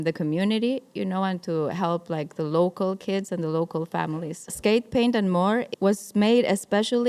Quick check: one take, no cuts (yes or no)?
no